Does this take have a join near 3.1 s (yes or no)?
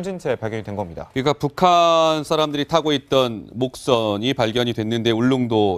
yes